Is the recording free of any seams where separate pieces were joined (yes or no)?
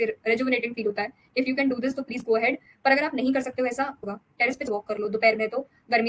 no